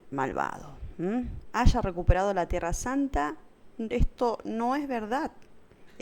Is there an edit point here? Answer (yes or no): yes